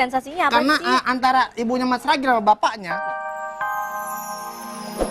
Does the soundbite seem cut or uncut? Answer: cut